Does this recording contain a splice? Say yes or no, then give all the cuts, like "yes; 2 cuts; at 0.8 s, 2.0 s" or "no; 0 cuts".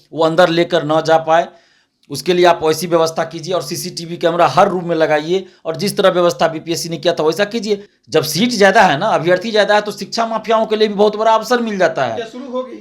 yes; 1 cut; at 7.9 s